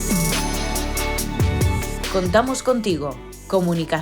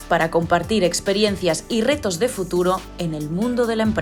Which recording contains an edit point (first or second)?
first